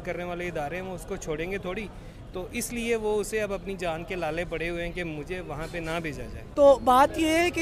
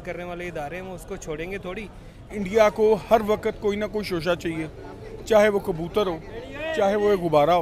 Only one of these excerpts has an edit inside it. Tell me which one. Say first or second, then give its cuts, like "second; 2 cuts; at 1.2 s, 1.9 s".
second; 1 cut; at 2.3 s